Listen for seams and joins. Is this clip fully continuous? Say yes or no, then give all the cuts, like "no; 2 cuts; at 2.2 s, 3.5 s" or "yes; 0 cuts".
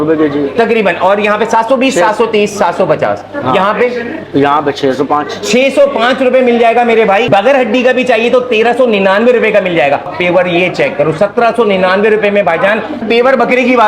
no; 3 cuts; at 7.3 s, 10.1 s, 13.0 s